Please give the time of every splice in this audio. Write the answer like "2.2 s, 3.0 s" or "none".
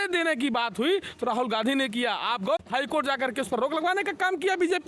2.6 s